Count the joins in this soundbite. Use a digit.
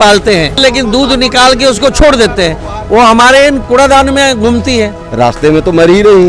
2